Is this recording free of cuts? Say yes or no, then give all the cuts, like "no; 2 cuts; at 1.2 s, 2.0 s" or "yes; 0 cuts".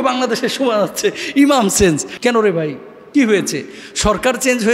no; 1 cut; at 2.1 s